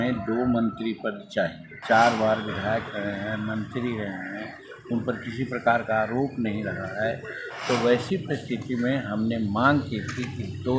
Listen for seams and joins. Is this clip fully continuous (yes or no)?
no